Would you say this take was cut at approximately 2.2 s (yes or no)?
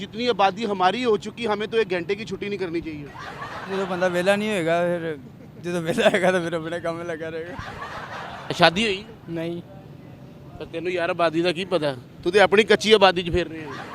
no